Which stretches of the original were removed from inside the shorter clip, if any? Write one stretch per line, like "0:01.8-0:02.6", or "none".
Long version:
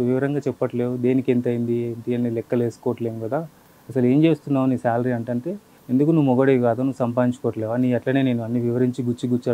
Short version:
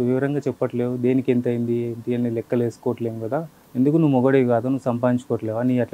0:03.6-0:05.7